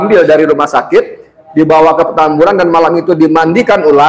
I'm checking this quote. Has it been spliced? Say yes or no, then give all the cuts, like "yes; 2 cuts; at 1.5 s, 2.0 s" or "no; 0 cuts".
no; 0 cuts